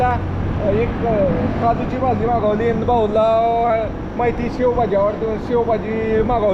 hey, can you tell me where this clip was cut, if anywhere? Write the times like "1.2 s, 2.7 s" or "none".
none

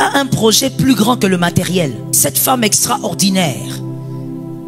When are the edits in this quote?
2.1 s

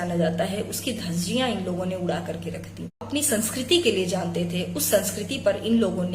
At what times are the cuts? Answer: 3.0 s

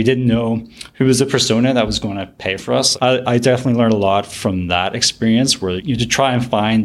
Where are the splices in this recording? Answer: 5.8 s

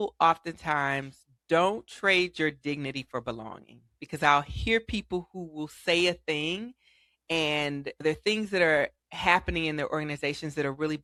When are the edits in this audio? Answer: none

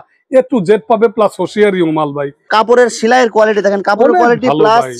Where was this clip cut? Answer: 2.5 s

